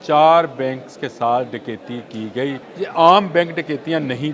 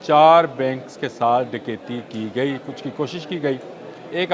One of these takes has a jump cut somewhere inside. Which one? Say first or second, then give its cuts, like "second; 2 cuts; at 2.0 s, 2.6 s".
first; 1 cut; at 2.6 s